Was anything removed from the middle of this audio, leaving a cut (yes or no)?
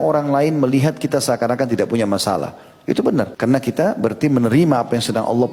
no